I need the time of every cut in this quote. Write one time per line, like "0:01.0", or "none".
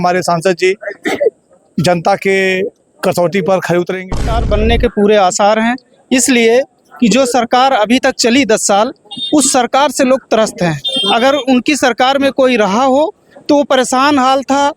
0:04.3